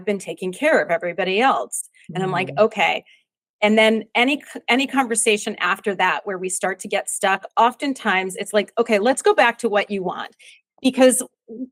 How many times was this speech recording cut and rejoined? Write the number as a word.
zero